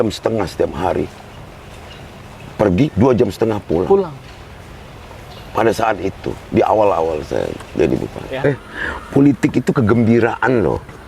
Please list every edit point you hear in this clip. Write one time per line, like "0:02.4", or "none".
0:08.4